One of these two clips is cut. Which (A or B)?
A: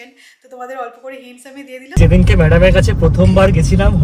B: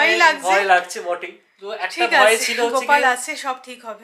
A